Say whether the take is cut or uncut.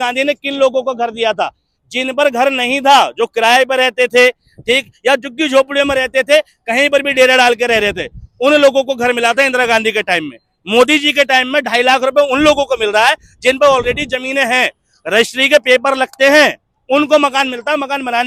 uncut